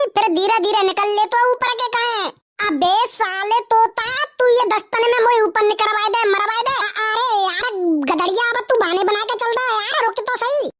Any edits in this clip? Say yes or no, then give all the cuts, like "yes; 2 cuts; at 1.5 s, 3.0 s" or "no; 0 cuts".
yes; 1 cut; at 6.9 s